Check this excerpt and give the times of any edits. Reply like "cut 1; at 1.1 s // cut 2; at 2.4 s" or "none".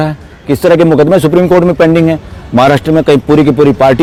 none

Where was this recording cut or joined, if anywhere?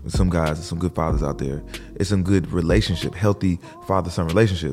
none

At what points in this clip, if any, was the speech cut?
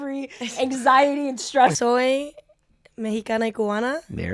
cut 1; at 1.8 s

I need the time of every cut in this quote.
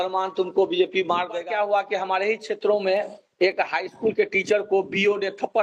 cut 1; at 1.4 s

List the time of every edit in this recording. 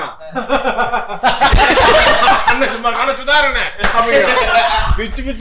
none

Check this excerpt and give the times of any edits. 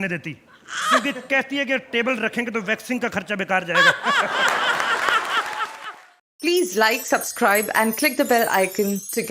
cut 1; at 5.7 s

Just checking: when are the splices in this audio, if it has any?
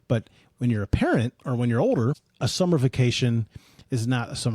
cut 1; at 2.3 s

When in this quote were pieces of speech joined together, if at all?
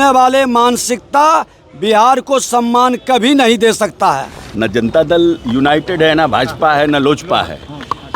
cut 1; at 4.3 s

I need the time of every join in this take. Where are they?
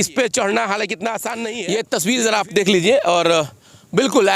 cut 1; at 1.5 s

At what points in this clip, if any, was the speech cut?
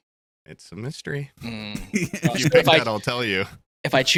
none

